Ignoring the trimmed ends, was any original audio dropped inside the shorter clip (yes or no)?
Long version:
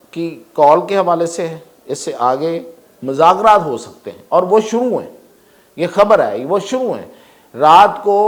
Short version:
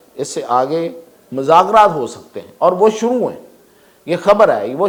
no